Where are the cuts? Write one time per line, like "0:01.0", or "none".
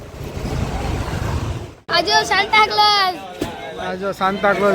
0:01.8